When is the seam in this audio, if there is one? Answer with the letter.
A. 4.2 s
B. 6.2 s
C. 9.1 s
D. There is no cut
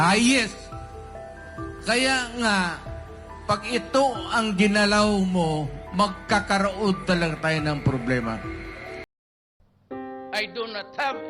C